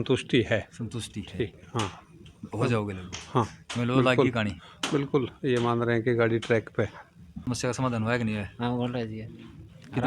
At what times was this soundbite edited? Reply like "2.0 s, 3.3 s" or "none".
7.3 s

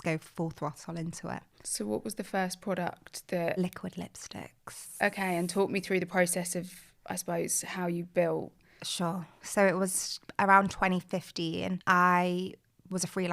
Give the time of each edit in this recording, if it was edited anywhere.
none

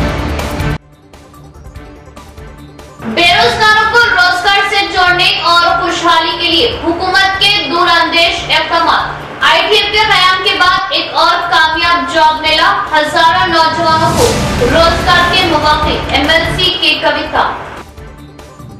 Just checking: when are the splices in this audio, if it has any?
2.3 s

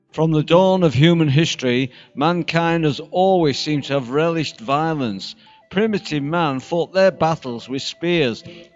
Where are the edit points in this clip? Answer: none

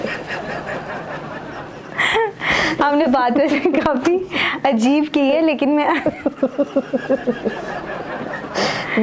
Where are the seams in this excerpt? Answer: none

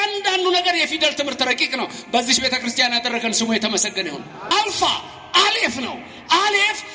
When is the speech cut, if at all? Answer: 4.5 s

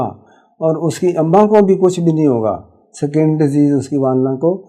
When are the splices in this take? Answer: none

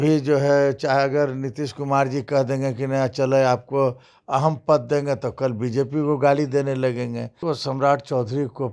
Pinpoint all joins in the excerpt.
7.3 s

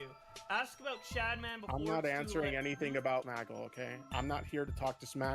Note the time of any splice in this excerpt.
3.3 s

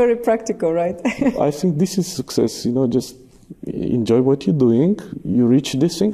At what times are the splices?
1.4 s

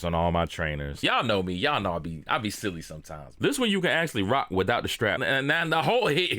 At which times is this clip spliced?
0.9 s, 3.4 s, 5.2 s

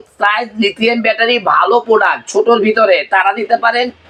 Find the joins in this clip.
none

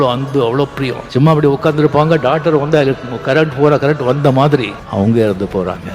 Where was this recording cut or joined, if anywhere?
1.0 s, 4.8 s

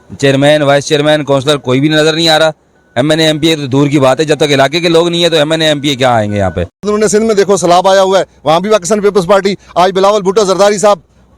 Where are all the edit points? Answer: 6.8 s

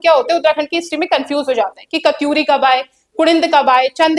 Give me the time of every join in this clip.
none

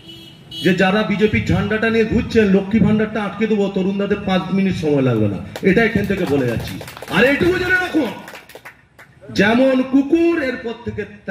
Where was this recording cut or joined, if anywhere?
6.9 s

